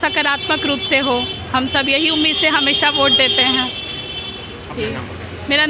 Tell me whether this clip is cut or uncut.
uncut